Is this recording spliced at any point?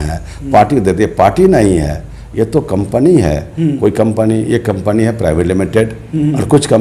no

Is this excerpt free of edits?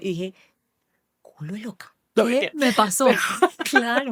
yes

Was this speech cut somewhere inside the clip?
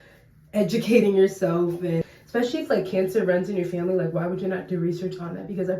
yes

